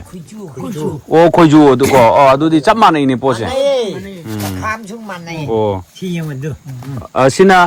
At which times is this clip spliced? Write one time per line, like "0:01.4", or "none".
none